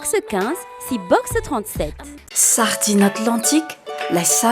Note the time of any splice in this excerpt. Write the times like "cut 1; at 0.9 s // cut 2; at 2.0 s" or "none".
cut 1; at 2.2 s